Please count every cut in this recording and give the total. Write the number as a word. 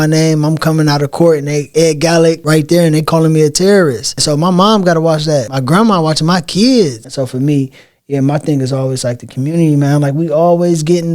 five